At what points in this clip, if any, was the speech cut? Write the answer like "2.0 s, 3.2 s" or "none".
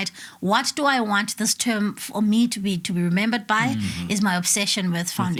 none